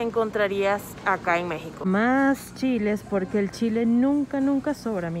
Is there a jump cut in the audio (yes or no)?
no